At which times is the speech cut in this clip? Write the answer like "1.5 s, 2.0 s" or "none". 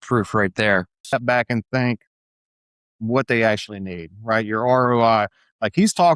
1.1 s